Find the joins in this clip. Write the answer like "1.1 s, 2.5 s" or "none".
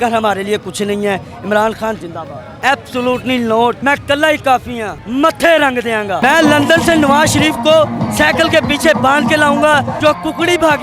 2.6 s, 6.2 s, 9.9 s